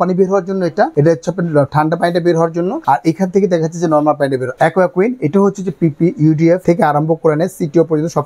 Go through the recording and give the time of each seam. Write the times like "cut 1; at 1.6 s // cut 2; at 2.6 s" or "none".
cut 1; at 0.9 s // cut 2; at 2.8 s // cut 3; at 4.5 s // cut 4; at 6.6 s